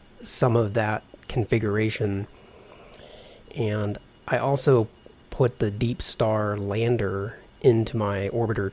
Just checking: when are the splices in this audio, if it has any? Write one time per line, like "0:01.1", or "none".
none